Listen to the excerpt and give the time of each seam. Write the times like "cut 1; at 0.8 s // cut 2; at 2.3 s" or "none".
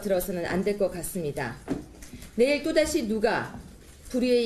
none